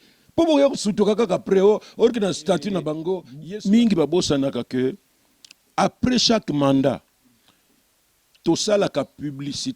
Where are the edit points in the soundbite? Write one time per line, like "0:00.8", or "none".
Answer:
0:03.3